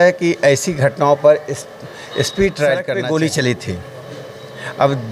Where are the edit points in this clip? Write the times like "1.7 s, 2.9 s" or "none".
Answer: 2.9 s